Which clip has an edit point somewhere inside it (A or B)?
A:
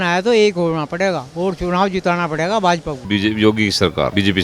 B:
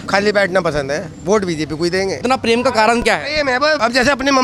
A